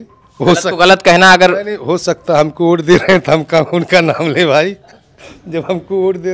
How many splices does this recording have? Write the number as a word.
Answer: zero